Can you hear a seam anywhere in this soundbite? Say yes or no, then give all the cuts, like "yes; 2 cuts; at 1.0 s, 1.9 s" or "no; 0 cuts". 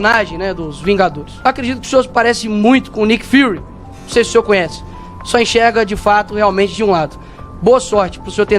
yes; 1 cut; at 1.3 s